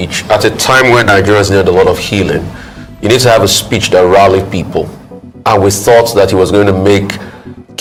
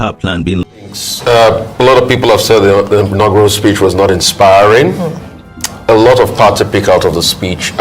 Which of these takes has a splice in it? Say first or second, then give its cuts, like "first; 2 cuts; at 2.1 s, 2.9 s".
second; 1 cut; at 1.0 s